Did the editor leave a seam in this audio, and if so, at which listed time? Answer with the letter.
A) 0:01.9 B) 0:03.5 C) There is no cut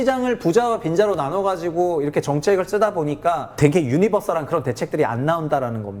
B